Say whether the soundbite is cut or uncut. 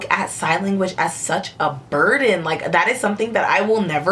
uncut